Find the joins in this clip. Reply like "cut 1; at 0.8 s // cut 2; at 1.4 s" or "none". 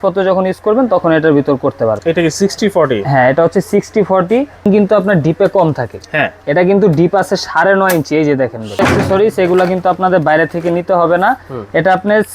cut 1; at 2.0 s // cut 2; at 4.7 s // cut 3; at 8.7 s